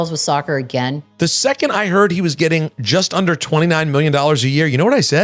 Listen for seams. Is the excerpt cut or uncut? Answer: cut